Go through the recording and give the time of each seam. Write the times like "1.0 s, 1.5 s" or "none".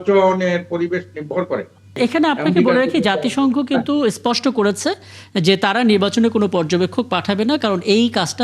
2.0 s